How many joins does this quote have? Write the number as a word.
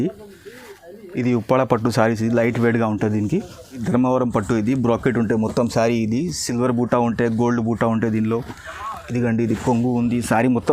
one